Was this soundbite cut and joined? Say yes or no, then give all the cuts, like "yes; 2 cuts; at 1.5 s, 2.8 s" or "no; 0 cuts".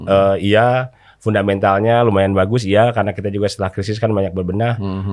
no; 0 cuts